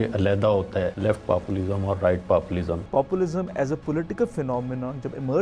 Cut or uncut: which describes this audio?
cut